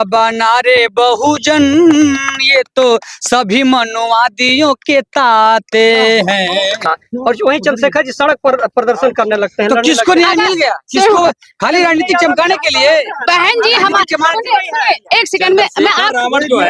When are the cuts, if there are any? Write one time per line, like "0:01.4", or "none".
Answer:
0:06.8

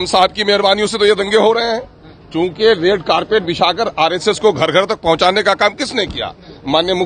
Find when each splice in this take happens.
none

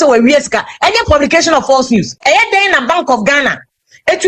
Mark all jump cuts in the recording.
0:02.2

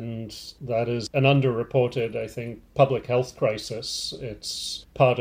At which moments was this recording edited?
0:01.0

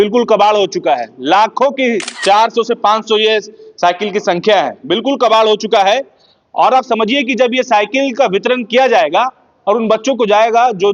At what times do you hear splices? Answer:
0:02.1

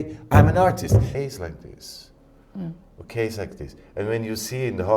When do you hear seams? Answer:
0:01.2

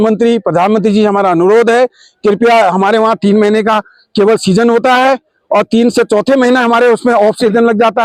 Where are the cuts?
none

